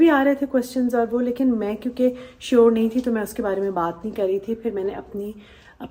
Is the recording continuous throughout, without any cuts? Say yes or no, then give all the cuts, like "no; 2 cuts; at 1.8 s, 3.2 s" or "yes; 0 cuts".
yes; 0 cuts